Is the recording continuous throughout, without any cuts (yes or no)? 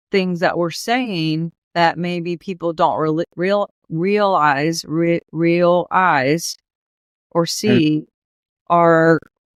yes